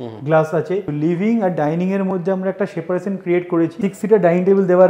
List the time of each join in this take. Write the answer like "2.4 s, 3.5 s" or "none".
0.9 s, 3.8 s